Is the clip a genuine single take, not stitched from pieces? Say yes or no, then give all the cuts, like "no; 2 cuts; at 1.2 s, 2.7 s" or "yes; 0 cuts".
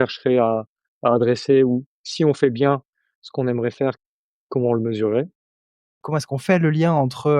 no; 1 cut; at 5.9 s